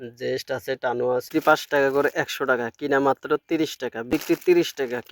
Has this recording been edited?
yes; 2 cuts; at 1.4 s, 4.2 s

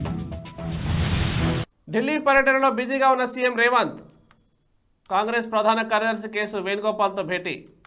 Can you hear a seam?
yes; 1 cut; at 1.7 s

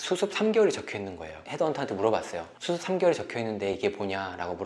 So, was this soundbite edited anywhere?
no; 0 cuts

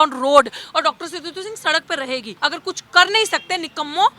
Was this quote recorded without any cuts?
no; 1 cut; at 2.3 s

